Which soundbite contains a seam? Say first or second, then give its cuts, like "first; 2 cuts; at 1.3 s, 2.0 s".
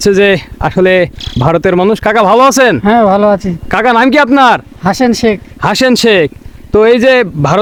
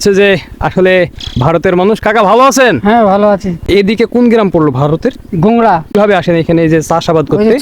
second; 2 cuts; at 3.6 s, 5.9 s